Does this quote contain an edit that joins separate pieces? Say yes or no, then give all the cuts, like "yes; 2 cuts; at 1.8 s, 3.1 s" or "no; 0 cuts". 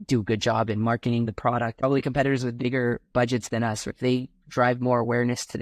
yes; 2 cuts; at 1.8 s, 3.9 s